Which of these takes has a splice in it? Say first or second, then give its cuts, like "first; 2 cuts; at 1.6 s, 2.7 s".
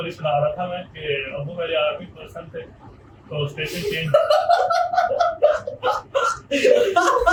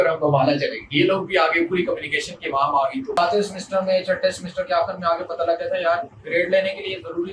second; 1 cut; at 3.2 s